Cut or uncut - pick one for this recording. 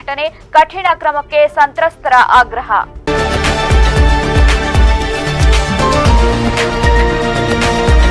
cut